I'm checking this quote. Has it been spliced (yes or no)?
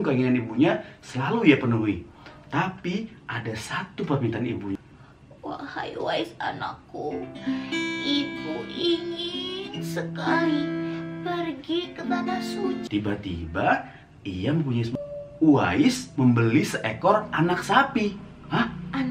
yes